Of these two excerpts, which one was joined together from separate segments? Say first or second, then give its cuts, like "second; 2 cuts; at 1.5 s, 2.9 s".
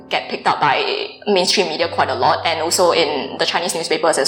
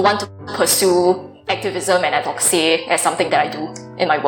second; 1 cut; at 3.3 s